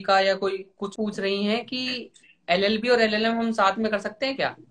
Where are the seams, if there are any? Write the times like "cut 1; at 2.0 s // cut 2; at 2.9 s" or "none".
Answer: cut 1; at 0.9 s

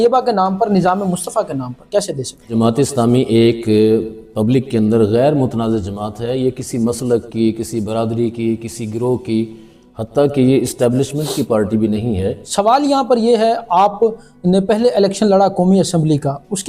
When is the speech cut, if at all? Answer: cut 1; at 2.5 s // cut 2; at 12.4 s

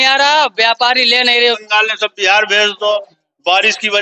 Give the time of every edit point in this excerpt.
cut 1; at 1.6 s

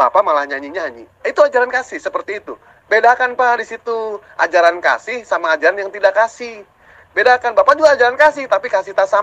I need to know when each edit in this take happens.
none

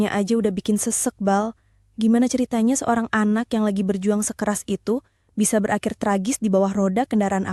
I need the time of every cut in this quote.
none

